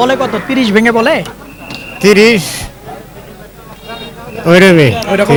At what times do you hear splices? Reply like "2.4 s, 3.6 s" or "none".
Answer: none